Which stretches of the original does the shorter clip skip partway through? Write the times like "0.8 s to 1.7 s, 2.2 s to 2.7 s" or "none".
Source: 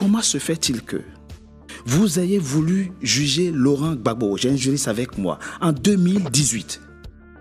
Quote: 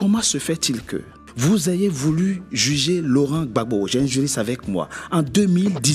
1.5 s to 2.0 s